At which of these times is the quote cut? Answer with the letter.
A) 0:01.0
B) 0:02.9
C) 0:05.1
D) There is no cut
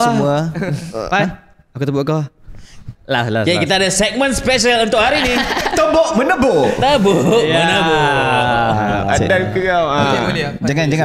B